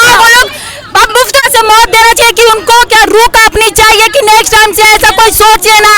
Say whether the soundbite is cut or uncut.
cut